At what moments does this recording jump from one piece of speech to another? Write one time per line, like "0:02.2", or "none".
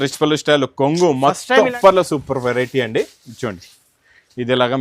0:01.7